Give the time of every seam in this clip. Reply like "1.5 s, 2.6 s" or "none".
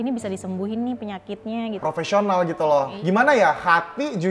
1.8 s, 2.9 s